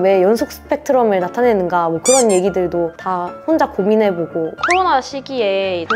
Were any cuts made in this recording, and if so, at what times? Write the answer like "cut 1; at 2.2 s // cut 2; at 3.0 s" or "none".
cut 1; at 4.6 s

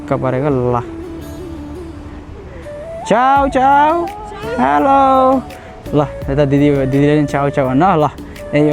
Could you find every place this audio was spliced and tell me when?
none

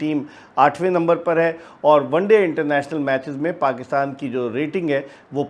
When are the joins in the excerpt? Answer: none

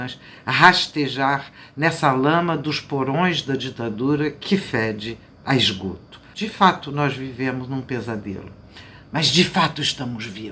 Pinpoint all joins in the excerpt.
cut 1; at 6.2 s

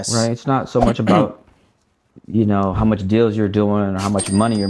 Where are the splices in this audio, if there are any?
none

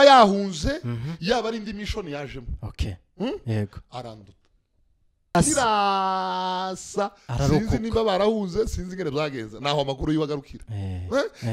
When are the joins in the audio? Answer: cut 1; at 5.4 s

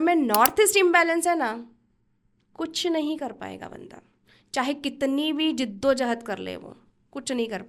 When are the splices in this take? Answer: none

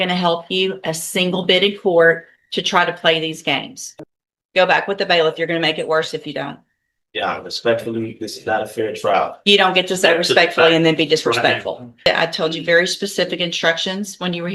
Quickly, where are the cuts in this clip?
cut 1; at 3.8 s // cut 2; at 12.1 s

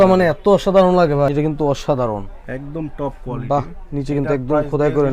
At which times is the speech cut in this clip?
cut 1; at 1.3 s

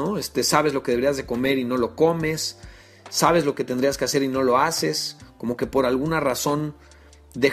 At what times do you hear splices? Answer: none

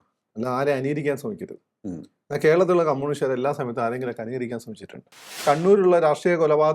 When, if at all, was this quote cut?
cut 1; at 5.4 s

